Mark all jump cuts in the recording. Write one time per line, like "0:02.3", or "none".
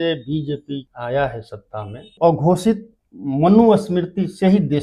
0:00.9
0:02.1